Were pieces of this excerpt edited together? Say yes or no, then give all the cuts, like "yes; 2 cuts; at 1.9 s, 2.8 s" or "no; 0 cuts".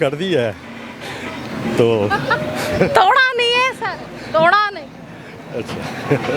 no; 0 cuts